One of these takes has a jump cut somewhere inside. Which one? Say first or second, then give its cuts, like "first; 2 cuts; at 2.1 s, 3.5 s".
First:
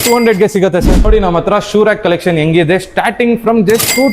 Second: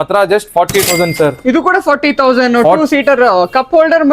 first; 1 cut; at 1.0 s